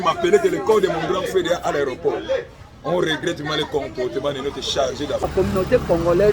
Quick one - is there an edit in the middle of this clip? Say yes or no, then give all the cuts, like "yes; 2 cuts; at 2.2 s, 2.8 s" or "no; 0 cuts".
yes; 1 cut; at 5.2 s